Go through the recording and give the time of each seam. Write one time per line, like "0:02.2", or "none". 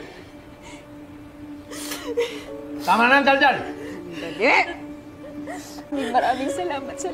0:05.9